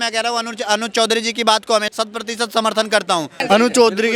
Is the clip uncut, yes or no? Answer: no